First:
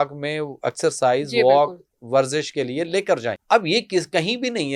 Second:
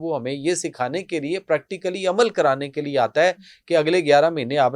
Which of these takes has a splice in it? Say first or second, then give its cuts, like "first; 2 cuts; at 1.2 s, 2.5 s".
first; 1 cut; at 3.4 s